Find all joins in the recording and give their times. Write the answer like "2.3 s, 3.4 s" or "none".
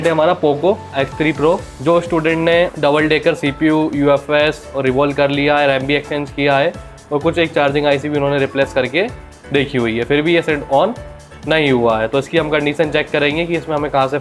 1.7 s, 2.7 s